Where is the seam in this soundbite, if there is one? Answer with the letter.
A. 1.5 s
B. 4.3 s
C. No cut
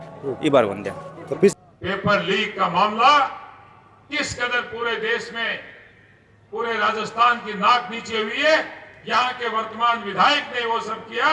A